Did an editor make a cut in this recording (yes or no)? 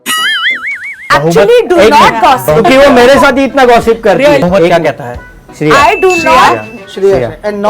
yes